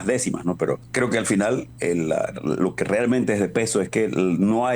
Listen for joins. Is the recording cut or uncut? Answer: cut